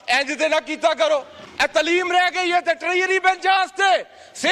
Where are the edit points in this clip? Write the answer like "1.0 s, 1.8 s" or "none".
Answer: 1.4 s